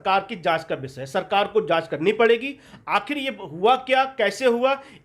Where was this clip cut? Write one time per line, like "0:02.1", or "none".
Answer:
none